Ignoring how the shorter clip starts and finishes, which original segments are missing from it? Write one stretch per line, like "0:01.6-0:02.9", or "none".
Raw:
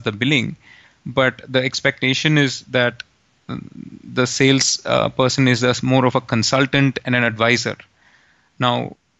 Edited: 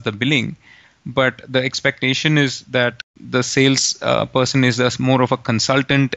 0:03.1-0:03.9